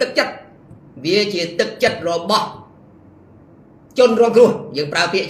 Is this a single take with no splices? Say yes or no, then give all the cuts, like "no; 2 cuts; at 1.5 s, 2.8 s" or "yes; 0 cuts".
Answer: yes; 0 cuts